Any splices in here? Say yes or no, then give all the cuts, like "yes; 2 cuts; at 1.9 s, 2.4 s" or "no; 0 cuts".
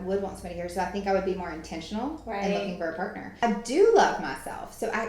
yes; 1 cut; at 3.3 s